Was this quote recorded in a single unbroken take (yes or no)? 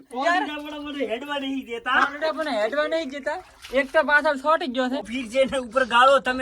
no